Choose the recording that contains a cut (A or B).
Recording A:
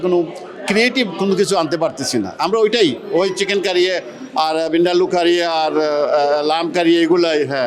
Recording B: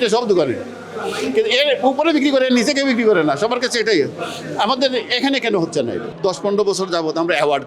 B